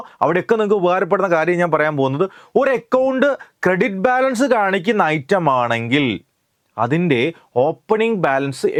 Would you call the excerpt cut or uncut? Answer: uncut